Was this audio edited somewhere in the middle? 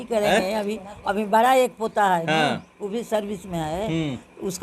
no; 0 cuts

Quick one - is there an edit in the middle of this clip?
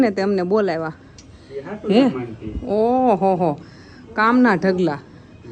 no; 0 cuts

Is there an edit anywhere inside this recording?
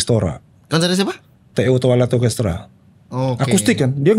no; 0 cuts

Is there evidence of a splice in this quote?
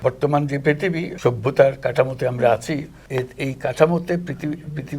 yes; 2 cuts; at 1.1 s, 3.0 s

